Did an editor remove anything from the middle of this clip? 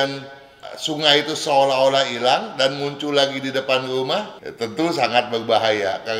yes; 1 cut; at 4.4 s

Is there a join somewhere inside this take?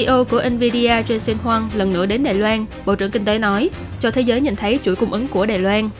yes; 1 cut; at 2.7 s

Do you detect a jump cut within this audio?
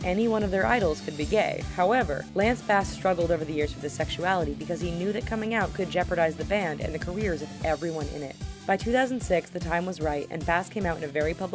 no; 0 cuts

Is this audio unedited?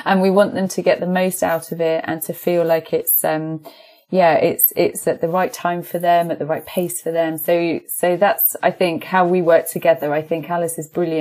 yes; 0 cuts

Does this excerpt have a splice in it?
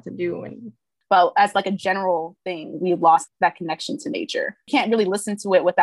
yes; 3 cuts; at 0.9 s, 3.2 s, 4.7 s

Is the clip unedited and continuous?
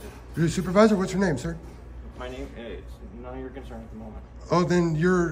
yes; 0 cuts

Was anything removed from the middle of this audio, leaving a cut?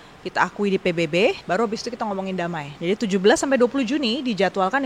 yes; 2 cuts; at 1.4 s, 2.7 s

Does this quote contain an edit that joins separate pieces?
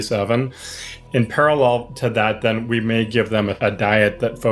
yes; 2 cuts; at 0.9 s, 3.5 s

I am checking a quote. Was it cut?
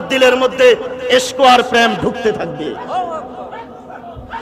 no; 0 cuts

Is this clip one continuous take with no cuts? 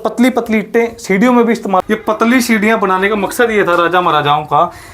no; 1 cut; at 1.8 s

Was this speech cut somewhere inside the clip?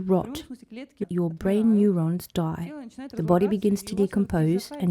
yes; 1 cut; at 1.0 s

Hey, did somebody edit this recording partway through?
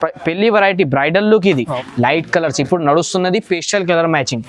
yes; 1 cut; at 1.8 s

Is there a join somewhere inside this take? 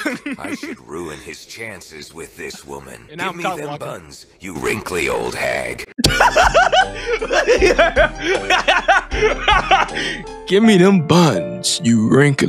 no; 0 cuts

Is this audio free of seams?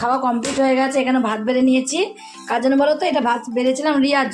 yes; 0 cuts

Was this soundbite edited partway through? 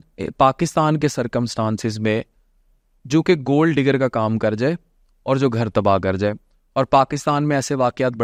no; 0 cuts

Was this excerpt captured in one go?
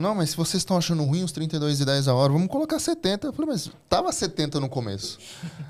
yes; 0 cuts

